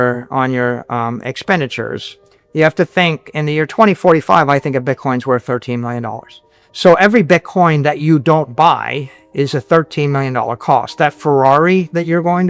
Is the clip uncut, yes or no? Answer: yes